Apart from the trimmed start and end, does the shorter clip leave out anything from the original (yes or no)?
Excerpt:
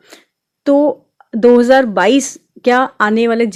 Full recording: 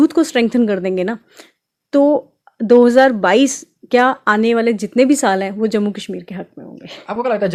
no